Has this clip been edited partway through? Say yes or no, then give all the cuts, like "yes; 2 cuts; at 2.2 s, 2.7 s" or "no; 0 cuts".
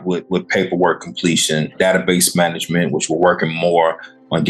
yes; 1 cut; at 1.8 s